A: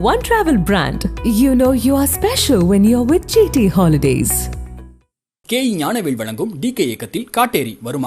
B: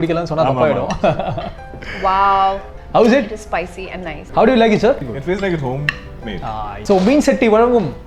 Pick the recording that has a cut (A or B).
B